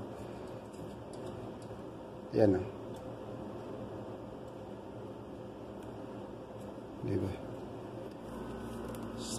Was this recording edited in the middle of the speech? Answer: yes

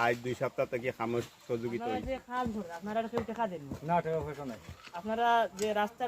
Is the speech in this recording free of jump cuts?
no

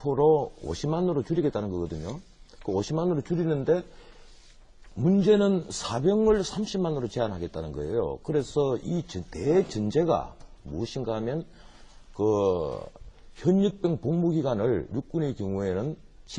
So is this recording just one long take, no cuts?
yes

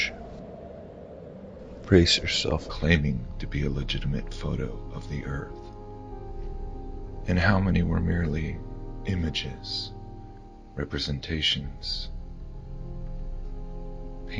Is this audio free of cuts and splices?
yes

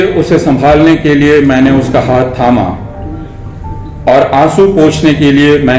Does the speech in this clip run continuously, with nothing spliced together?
yes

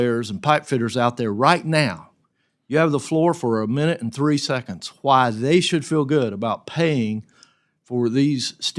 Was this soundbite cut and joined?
no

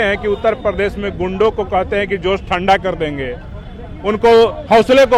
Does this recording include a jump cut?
no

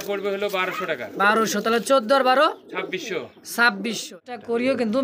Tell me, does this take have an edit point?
yes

